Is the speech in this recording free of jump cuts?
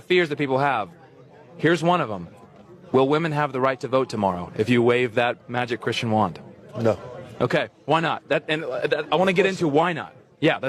no; 1 cut; at 9.3 s

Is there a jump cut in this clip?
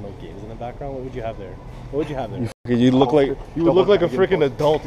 no; 0 cuts

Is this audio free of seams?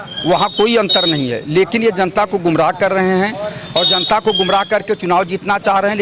yes; 0 cuts

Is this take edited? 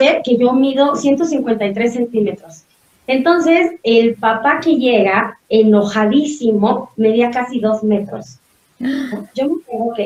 no; 0 cuts

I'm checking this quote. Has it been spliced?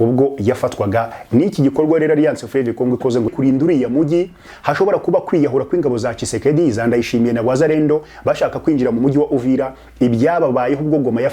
yes; 1 cut; at 3.3 s

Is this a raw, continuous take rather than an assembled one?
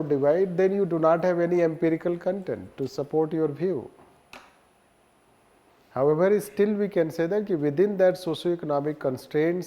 no; 1 cut; at 5.7 s

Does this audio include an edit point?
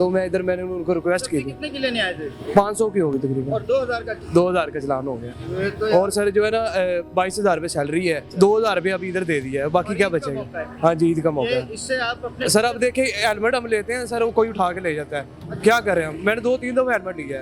no; 0 cuts

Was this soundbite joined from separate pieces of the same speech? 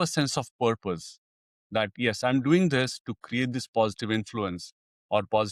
no; 0 cuts

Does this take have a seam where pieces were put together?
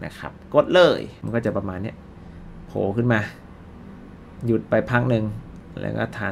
yes; 1 cut; at 1.2 s

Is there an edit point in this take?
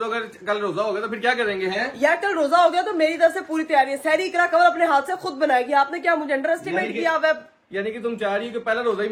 no; 0 cuts

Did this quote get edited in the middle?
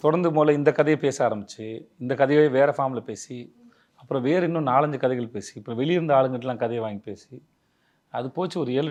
no; 0 cuts

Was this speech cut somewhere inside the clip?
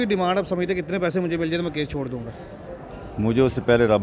no; 0 cuts

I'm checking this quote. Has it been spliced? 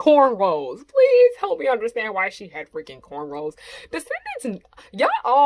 no; 0 cuts

